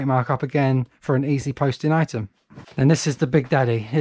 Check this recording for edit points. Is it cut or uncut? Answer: uncut